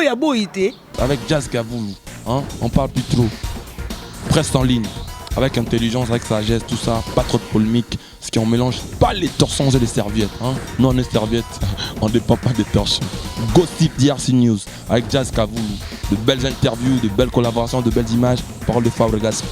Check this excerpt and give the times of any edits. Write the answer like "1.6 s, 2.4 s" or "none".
0.9 s

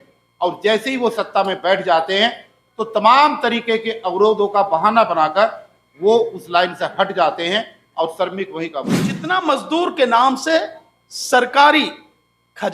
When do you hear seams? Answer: 9.1 s

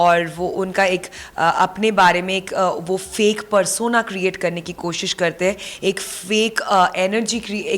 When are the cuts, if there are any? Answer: none

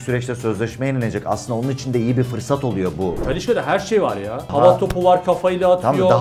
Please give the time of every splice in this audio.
3.2 s, 4.4 s

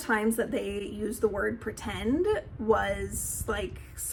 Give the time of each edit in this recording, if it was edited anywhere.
none

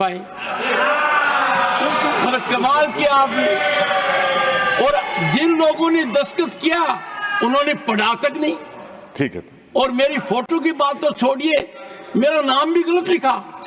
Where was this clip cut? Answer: none

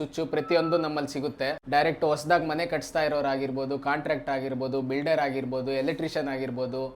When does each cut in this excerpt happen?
1.6 s

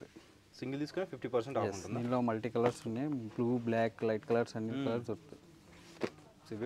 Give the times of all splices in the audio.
none

